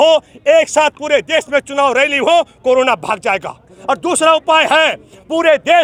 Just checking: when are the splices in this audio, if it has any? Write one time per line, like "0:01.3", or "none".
none